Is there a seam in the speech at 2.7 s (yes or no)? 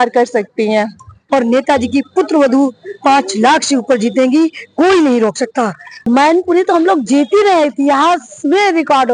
no